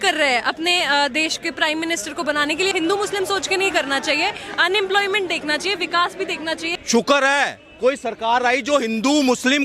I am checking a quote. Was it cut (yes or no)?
yes